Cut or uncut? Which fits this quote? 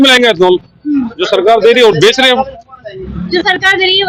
uncut